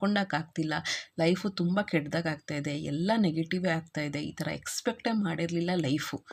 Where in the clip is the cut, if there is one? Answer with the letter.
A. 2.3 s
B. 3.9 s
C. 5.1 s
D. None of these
D